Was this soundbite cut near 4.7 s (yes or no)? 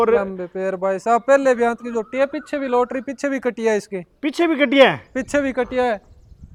no